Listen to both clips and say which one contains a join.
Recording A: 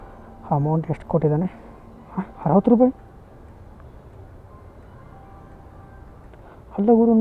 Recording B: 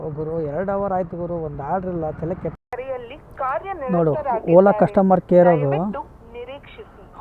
B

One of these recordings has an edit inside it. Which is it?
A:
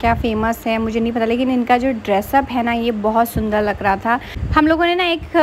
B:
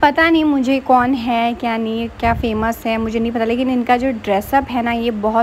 A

